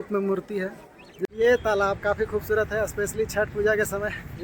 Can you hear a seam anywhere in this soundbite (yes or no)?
yes